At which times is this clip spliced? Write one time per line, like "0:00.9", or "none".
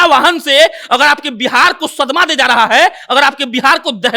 none